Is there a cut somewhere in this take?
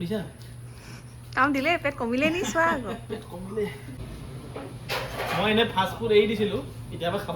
yes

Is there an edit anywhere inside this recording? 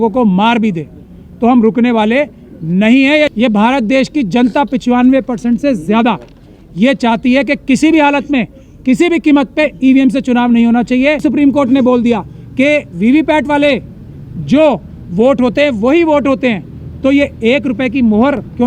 yes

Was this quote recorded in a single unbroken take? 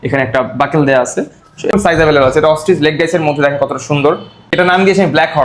no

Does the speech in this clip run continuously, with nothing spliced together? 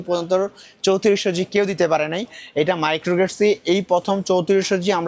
yes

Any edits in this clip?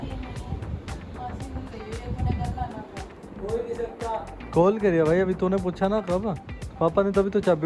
no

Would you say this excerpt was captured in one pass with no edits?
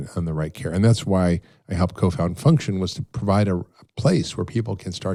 yes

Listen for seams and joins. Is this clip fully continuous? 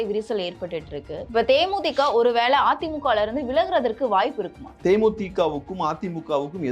no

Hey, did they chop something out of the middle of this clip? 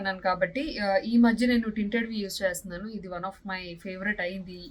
no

